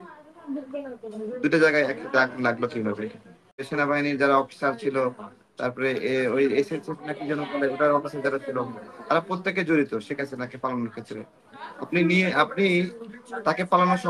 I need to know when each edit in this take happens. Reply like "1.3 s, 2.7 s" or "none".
3.7 s